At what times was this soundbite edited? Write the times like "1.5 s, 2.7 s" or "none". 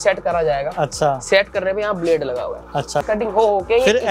3.0 s